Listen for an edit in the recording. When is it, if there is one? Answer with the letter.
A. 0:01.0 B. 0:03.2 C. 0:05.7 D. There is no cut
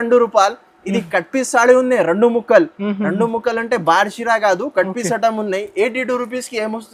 D